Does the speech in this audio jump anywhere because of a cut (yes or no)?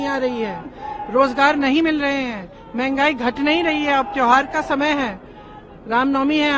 no